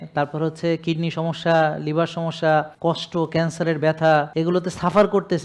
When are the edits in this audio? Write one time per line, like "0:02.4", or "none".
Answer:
0:02.7
0:04.3